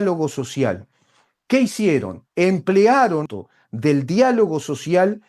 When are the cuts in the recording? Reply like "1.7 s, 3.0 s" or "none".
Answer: 3.3 s

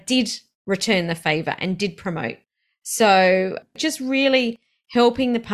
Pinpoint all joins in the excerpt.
3.7 s

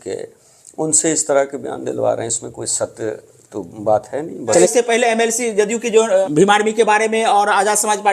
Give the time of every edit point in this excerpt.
4.7 s, 6.3 s

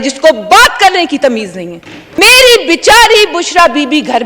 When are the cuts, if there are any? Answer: 2.2 s

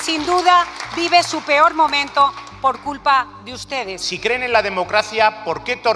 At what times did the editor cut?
4.0 s

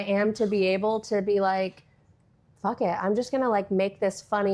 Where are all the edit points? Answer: none

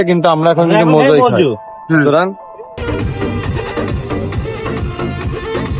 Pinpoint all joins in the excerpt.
2.8 s

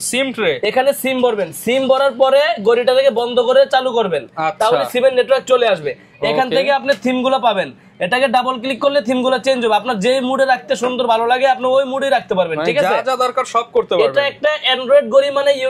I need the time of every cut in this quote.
none

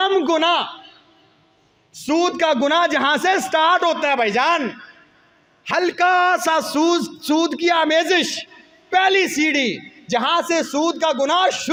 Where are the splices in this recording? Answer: none

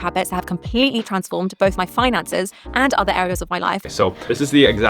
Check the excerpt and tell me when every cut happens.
3.8 s

